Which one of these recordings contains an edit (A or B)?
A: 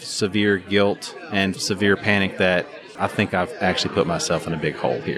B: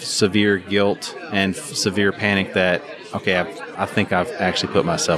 A